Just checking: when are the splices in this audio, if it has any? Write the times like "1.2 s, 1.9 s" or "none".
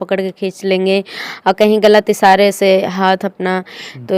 none